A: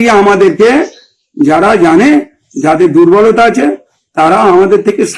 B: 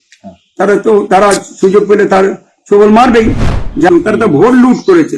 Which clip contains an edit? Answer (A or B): B